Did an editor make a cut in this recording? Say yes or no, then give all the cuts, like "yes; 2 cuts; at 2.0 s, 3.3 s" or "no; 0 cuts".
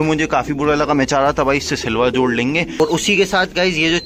yes; 1 cut; at 2.8 s